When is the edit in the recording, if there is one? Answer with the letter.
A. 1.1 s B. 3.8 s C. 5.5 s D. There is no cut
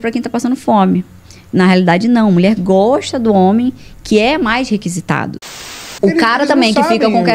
C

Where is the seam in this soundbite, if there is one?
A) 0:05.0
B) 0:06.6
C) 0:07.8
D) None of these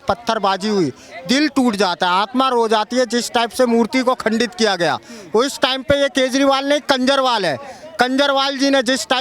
D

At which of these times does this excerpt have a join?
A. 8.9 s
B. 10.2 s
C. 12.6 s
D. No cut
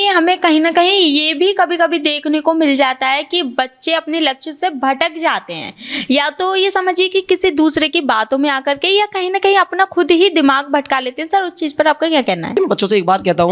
C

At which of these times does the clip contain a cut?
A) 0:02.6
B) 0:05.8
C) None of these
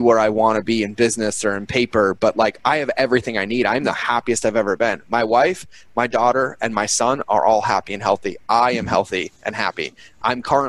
C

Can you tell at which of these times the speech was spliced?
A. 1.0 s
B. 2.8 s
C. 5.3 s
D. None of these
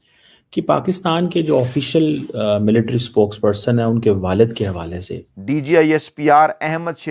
C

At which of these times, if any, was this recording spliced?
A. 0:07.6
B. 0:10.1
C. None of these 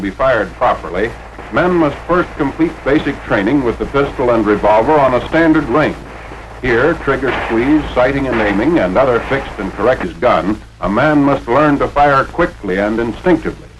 C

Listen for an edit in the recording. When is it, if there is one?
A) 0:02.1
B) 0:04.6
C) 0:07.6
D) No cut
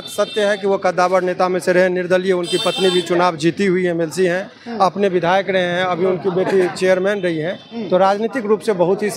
D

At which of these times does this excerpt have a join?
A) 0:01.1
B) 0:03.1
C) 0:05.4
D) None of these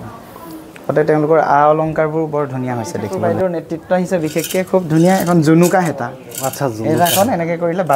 B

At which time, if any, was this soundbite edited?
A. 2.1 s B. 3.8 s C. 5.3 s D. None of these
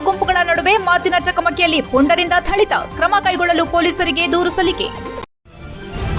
C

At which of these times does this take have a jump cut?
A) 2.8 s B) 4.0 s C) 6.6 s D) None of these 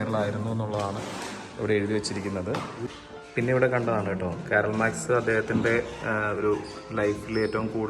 A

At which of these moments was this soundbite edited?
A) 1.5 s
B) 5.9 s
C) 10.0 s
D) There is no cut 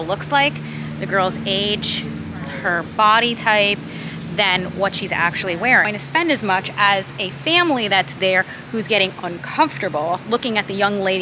B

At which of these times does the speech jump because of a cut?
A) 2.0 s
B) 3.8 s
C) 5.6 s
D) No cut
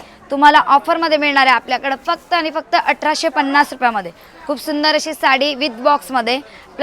D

